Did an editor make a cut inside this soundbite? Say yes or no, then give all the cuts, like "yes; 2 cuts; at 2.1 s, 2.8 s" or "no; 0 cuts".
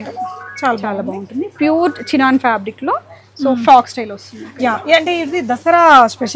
no; 0 cuts